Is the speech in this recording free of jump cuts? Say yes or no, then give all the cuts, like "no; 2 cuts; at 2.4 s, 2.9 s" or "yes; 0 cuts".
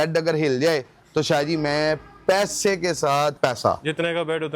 no; 1 cut; at 3.4 s